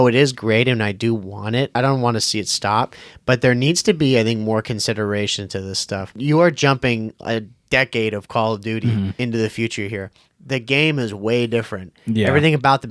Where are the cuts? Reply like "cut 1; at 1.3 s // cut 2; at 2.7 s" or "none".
cut 1; at 1.8 s // cut 2; at 6.2 s // cut 3; at 9.2 s